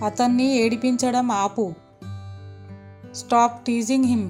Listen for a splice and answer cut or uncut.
uncut